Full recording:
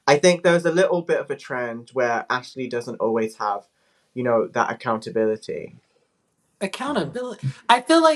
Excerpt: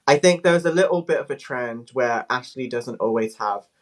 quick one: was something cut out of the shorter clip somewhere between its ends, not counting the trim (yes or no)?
no